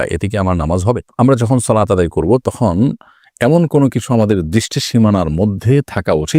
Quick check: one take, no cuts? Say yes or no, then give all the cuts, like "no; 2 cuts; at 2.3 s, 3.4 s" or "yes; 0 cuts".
yes; 0 cuts